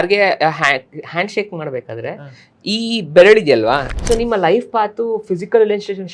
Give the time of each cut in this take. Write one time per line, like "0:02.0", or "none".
0:03.9